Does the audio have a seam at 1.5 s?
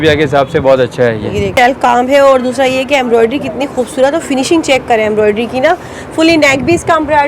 yes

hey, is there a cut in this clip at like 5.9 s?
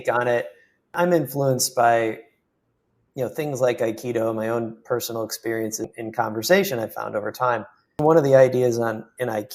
yes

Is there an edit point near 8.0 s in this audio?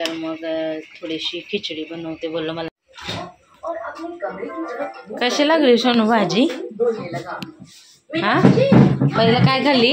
no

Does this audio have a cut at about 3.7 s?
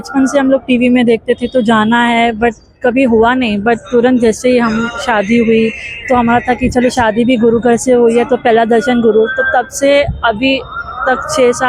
no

